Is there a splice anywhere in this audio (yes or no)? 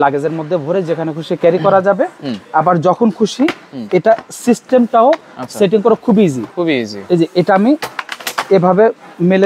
no